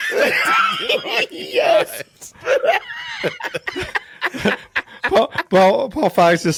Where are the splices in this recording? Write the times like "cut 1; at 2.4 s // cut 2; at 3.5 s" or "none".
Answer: none